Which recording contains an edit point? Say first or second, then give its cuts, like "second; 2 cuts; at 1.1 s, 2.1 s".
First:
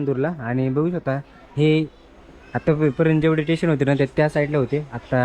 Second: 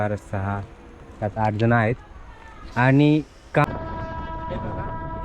second; 1 cut; at 3.6 s